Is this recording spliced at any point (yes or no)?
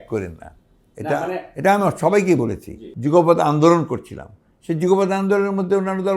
yes